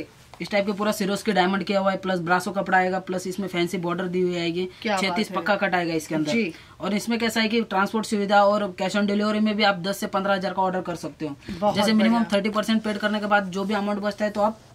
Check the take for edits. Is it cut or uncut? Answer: uncut